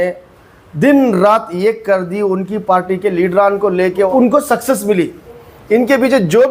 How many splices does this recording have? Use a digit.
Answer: 2